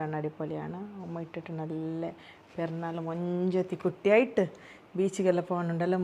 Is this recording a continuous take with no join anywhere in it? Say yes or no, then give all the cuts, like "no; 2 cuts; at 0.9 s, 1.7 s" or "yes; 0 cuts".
yes; 0 cuts